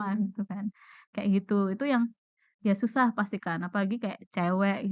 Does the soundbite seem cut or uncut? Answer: uncut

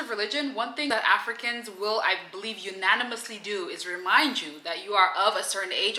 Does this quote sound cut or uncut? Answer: cut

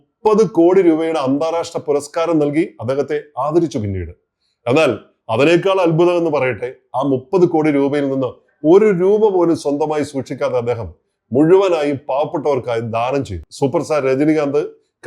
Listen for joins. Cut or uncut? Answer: cut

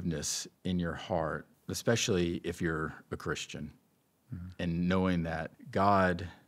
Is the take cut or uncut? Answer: cut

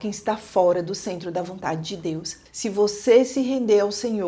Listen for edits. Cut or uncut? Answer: cut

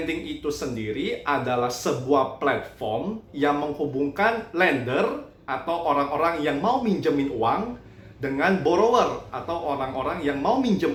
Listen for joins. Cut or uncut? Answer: uncut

